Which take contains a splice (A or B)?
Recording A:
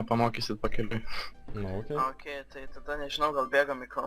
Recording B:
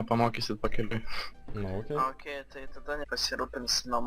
A